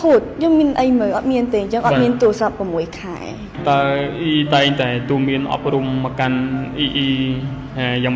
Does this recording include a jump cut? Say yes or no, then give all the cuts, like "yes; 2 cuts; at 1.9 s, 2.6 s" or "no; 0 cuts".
yes; 1 cut; at 3.5 s